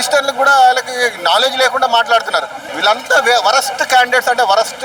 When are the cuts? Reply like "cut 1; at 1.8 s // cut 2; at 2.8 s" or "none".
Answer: none